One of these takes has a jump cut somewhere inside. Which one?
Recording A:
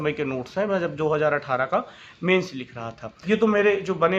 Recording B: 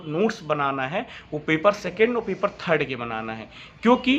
A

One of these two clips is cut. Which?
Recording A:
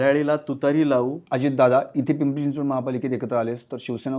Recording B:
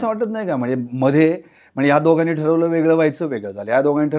A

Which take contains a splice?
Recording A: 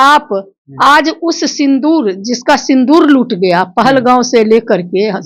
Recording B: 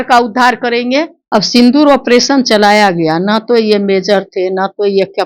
B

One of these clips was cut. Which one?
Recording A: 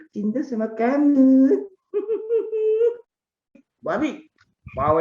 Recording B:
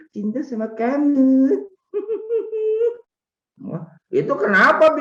A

